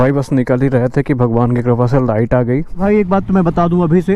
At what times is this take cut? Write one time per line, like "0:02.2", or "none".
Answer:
0:02.8

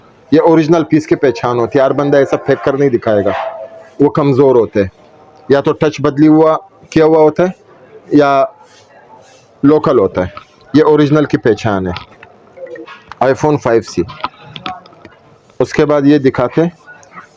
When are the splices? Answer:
none

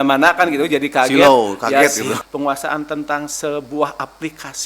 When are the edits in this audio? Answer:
0:02.1

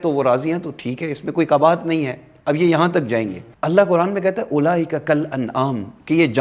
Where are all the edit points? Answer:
none

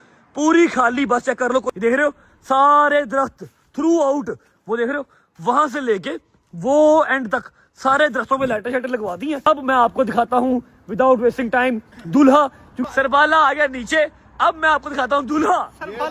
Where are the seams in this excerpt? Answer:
0:01.7
0:09.4
0:12.7

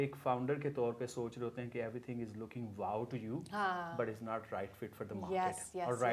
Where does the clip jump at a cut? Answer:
none

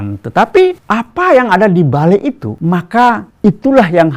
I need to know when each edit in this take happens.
0:00.8
0:02.5
0:03.3

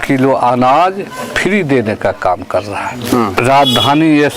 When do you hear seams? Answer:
0:03.4

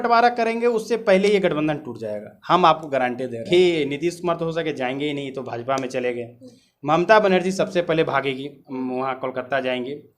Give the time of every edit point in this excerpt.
0:03.4

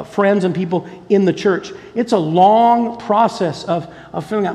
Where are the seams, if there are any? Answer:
none

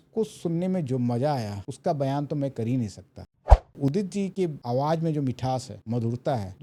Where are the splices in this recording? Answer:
0:03.3

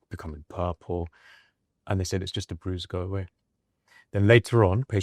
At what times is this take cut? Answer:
none

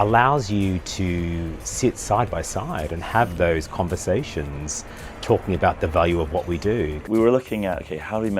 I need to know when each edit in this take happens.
0:07.0

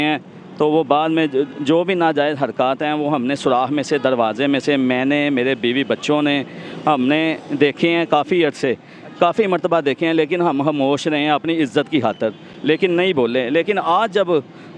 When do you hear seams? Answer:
none

